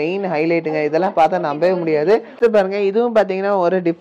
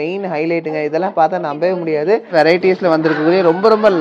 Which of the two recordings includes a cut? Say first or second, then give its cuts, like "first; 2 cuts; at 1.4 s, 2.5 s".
second; 1 cut; at 2.3 s